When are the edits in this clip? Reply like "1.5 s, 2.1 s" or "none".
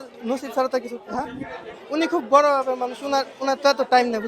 1.7 s